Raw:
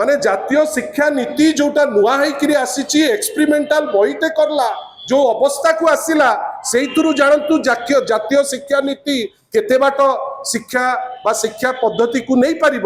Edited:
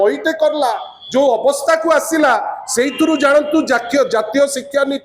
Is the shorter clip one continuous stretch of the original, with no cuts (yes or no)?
yes